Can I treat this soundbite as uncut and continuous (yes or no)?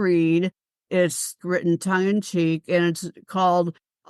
no